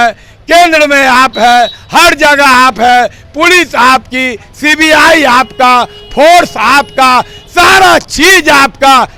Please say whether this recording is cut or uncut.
uncut